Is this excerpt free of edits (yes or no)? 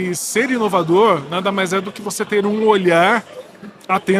yes